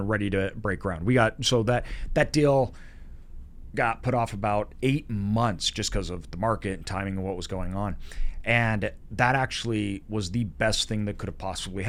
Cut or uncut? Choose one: uncut